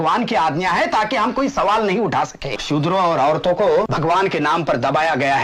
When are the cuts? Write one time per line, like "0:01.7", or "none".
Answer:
0:02.6
0:03.9